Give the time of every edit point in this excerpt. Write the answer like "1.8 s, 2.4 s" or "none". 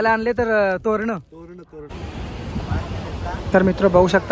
2.0 s